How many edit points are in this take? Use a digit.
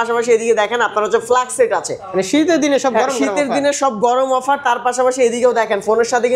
0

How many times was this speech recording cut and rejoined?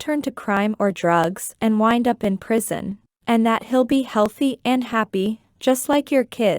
2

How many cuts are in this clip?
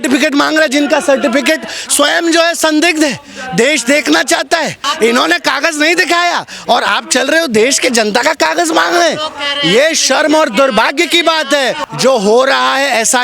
2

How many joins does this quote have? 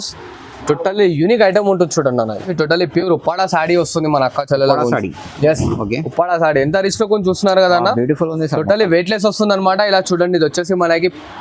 1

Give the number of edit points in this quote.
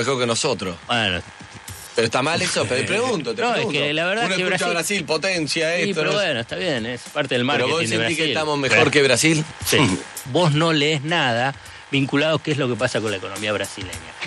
2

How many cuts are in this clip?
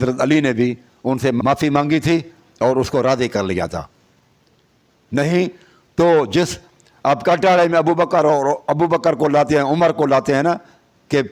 1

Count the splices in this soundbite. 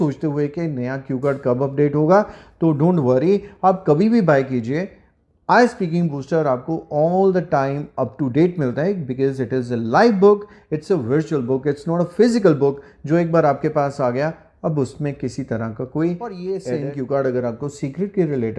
1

